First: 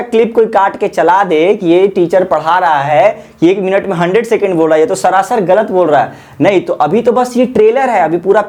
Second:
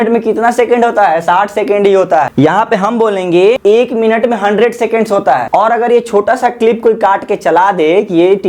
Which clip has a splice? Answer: second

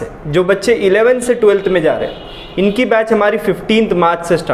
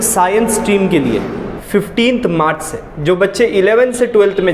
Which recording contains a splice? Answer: second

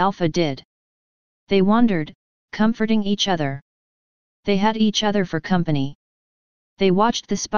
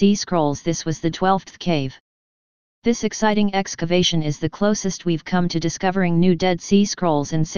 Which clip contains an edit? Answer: second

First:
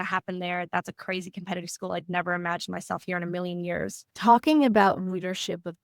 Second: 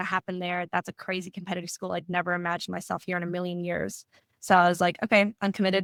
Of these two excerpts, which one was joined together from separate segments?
first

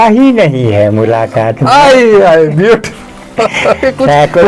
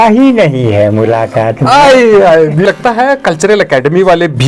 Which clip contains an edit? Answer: second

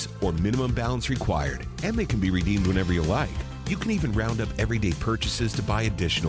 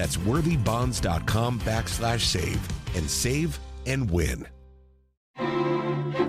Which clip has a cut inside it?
second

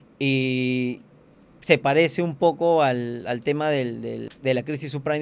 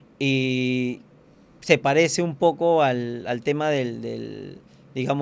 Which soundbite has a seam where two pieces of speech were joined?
first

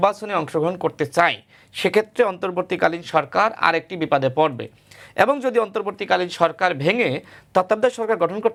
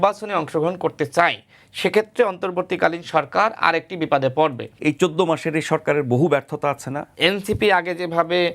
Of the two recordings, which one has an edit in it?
second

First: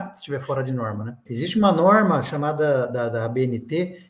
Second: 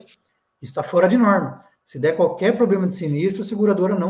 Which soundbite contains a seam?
first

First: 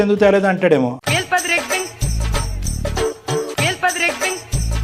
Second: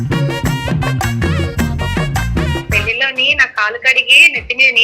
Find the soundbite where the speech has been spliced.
second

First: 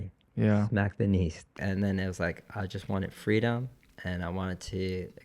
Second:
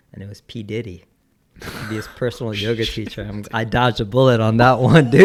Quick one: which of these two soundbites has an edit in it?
first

